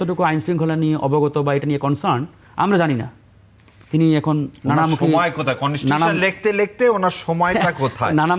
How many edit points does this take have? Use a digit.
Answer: 0